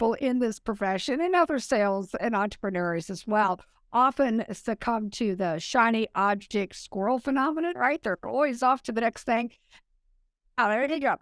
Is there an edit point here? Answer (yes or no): no